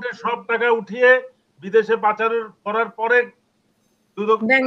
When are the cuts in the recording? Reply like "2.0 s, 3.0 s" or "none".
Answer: none